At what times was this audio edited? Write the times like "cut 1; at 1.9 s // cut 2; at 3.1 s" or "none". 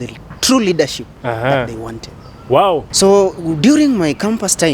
cut 1; at 2.9 s